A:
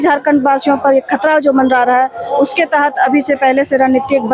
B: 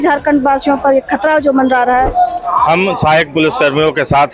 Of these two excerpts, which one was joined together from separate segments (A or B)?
B